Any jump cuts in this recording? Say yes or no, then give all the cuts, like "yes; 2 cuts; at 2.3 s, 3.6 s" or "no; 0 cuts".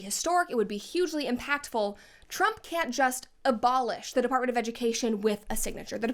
no; 0 cuts